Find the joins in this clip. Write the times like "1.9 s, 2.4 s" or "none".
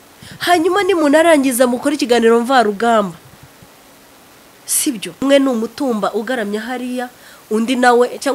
5.2 s